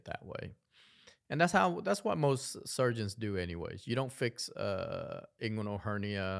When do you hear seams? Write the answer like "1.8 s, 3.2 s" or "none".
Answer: none